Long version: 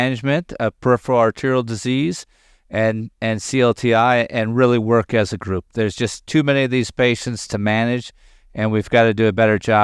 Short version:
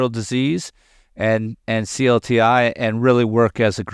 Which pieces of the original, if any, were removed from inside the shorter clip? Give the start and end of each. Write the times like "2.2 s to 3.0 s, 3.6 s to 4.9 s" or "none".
none